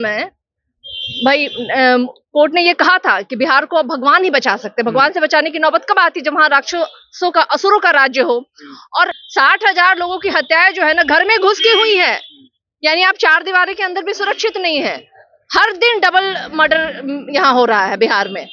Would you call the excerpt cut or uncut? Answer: cut